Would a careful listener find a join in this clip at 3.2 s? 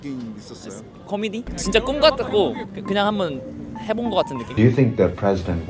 no; 2 cuts; at 1.5 s, 4.4 s

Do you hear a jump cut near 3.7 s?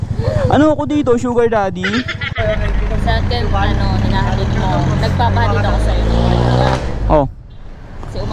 no; 1 cut; at 2.2 s

